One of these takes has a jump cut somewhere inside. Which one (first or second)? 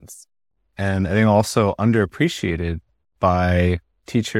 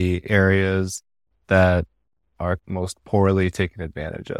second